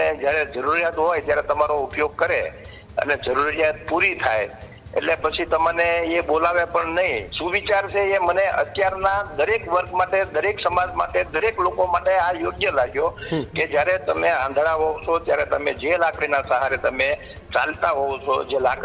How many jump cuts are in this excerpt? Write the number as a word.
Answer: one